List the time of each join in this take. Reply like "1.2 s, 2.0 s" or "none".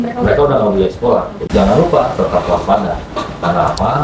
1.4 s